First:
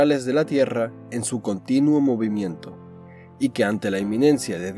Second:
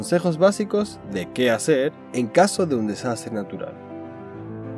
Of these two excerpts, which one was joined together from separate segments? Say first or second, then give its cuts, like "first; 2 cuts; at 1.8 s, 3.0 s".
second; 1 cut; at 3.7 s